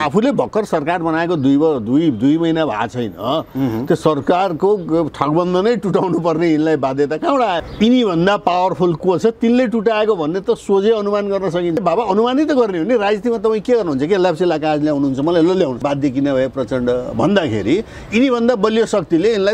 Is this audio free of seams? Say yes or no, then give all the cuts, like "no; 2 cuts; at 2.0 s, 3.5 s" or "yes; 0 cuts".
no; 3 cuts; at 7.6 s, 11.8 s, 15.8 s